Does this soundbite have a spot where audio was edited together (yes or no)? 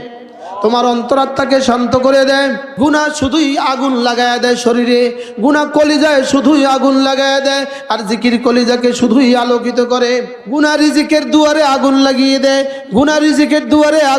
yes